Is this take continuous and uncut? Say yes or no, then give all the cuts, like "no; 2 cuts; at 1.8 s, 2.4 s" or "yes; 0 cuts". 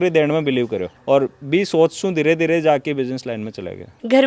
yes; 0 cuts